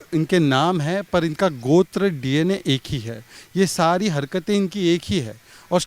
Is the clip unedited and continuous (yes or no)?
yes